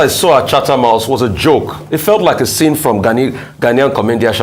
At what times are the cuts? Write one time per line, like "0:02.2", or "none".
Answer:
none